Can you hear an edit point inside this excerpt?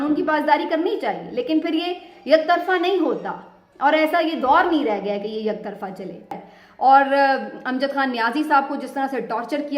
yes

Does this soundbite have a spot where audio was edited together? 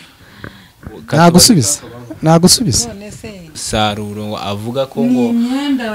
yes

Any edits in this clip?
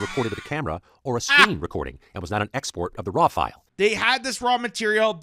yes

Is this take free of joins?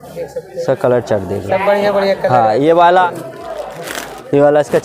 no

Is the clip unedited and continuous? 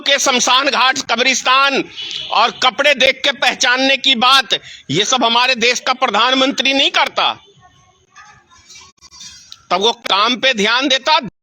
yes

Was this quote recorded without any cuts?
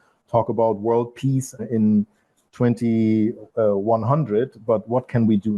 yes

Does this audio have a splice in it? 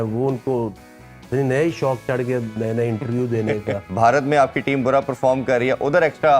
yes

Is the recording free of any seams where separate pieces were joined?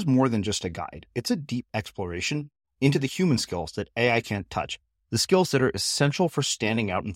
yes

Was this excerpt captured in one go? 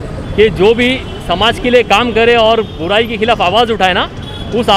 yes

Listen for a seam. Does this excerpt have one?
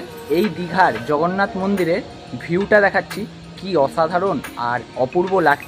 no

